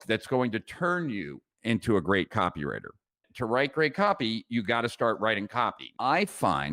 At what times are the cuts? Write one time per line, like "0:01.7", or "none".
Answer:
0:05.8